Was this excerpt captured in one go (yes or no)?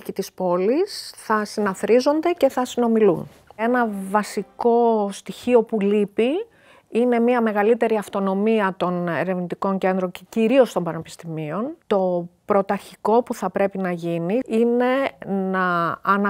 no